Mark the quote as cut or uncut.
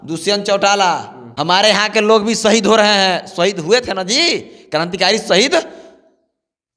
cut